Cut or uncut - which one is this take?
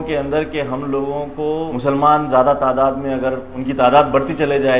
cut